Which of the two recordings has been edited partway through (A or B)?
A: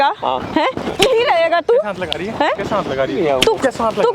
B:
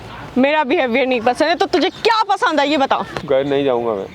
B